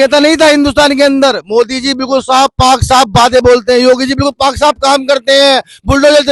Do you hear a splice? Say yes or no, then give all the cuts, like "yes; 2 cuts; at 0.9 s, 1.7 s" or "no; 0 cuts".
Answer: no; 0 cuts